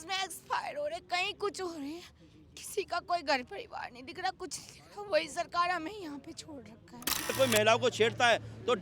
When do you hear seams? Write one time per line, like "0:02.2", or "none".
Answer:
0:07.3